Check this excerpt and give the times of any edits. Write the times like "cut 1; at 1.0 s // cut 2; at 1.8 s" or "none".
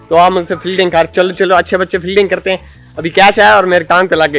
none